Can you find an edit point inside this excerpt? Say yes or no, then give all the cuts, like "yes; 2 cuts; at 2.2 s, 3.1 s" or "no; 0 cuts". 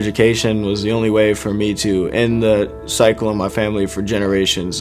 no; 0 cuts